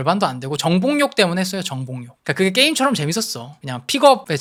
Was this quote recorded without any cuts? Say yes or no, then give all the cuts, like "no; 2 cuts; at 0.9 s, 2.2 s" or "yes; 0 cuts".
yes; 0 cuts